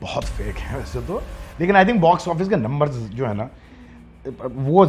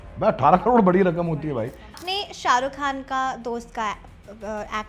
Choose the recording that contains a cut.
second; 1 cut; at 2.1 s

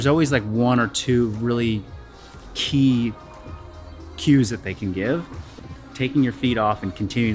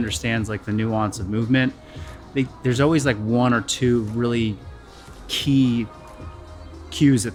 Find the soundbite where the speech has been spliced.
first; 1 cut; at 5.8 s

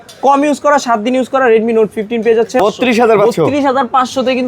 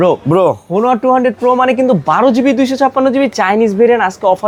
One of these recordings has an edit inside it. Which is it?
first; 1 cut; at 2.6 s

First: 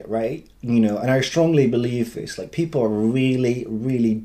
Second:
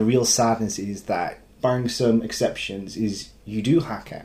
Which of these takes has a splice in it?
second; 1 cut; at 1.4 s

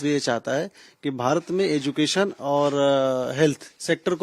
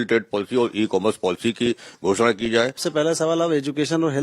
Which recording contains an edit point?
second; 1 cut; at 2.8 s

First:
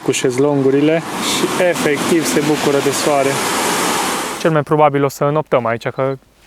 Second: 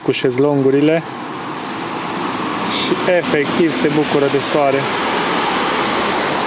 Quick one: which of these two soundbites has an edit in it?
first; 2 cuts; at 1.2 s, 4.2 s

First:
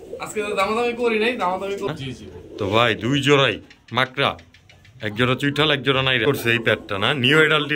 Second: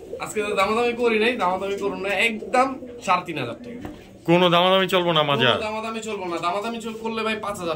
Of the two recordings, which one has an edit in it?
first; 2 cuts; at 1.9 s, 6.2 s

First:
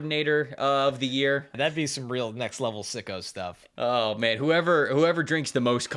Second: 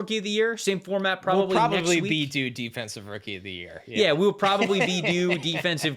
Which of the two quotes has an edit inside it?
first; 2 cuts; at 1.5 s, 3.6 s

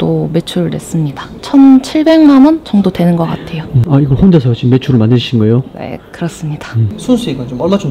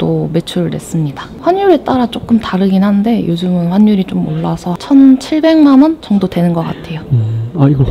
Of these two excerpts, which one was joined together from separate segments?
first; 3 cuts; at 1.3 s, 3.7 s, 6.9 s

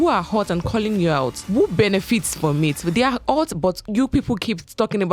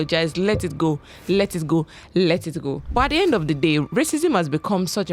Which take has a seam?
first; 2 cuts; at 1.4 s, 3.8 s

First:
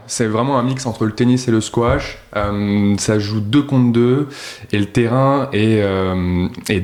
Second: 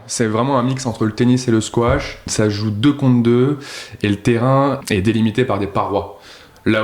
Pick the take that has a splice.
second; 2 cuts; at 2.3 s, 4.8 s

